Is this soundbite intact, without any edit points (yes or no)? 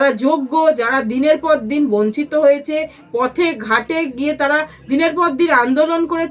yes